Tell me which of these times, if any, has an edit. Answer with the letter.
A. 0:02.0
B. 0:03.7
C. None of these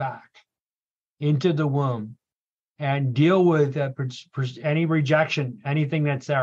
C